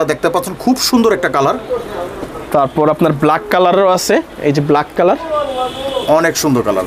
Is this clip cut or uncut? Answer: uncut